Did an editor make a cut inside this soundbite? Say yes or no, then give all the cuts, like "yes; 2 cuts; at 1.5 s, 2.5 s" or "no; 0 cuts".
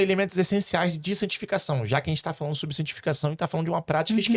no; 0 cuts